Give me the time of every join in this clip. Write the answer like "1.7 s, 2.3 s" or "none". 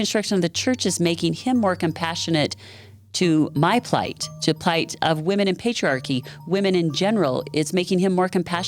none